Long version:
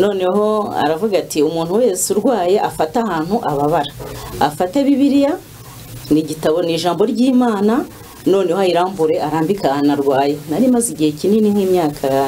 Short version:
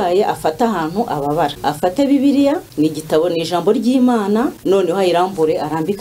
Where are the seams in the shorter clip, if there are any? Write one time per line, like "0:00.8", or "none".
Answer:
0:01.6
0:02.7
0:04.6